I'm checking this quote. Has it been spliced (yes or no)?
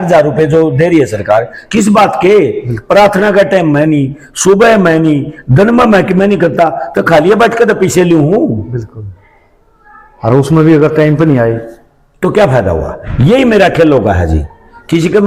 no